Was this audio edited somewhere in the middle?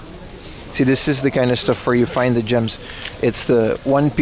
no; 0 cuts

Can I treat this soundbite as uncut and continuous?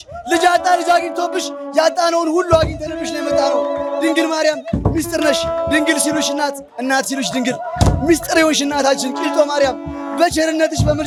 yes; 0 cuts

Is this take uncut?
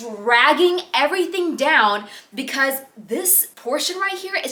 yes; 0 cuts

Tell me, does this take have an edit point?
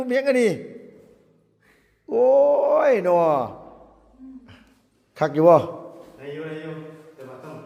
no; 0 cuts

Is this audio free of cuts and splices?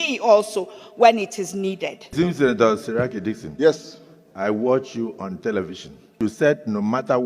no; 2 cuts; at 2.0 s, 6.2 s

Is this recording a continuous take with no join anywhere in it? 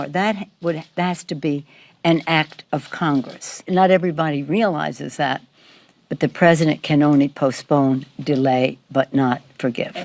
no; 1 cut; at 4.0 s

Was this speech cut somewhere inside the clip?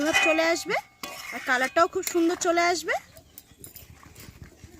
no; 0 cuts

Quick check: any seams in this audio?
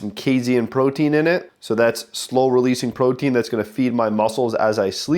yes; 1 cut; at 1.5 s

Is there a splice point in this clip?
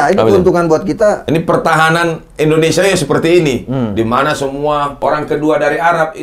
yes; 2 cuts; at 1.2 s, 4.9 s

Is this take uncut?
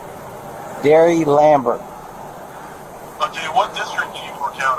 yes; 0 cuts

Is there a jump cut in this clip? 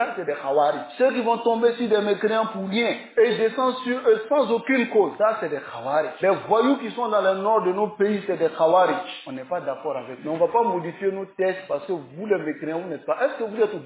no; 0 cuts

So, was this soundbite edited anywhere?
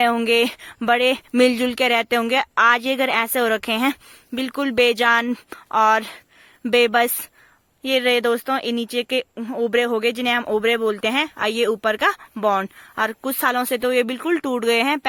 no; 0 cuts

